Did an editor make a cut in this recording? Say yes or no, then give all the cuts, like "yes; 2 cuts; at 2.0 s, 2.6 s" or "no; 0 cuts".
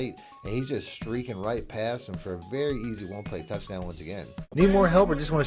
yes; 1 cut; at 4.5 s